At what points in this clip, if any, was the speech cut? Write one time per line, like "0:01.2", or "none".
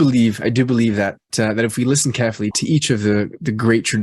0:01.3
0:02.5